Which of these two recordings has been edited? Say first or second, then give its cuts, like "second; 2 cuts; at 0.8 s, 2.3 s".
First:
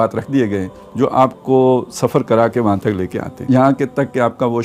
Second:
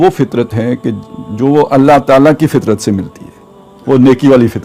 first; 1 cut; at 3.5 s